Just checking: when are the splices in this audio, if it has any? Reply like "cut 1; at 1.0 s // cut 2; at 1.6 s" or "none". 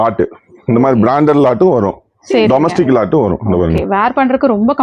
none